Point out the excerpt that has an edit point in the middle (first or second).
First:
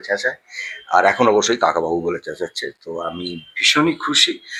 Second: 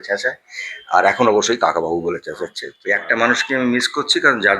second